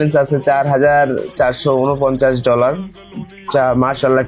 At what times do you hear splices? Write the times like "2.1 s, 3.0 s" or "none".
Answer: none